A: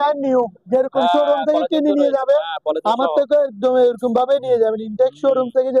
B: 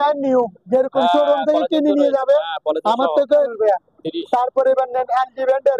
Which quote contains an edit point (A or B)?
B